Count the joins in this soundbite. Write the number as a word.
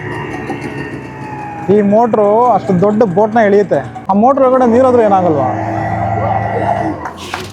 zero